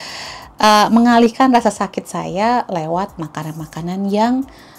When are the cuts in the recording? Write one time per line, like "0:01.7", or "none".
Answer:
none